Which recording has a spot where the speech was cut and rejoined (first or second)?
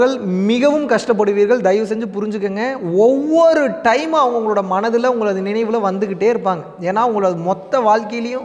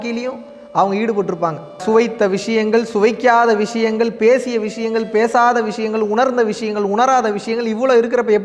second